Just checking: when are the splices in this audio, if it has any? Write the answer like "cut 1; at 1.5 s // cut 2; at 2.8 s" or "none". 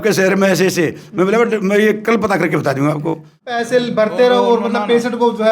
cut 1; at 3.6 s